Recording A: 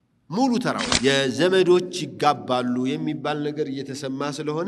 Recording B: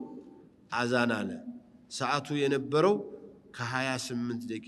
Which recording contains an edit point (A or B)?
A